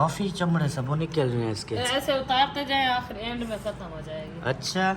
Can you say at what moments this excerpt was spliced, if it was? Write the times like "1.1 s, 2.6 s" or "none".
none